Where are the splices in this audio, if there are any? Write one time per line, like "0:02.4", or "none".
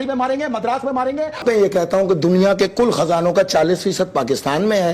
0:01.4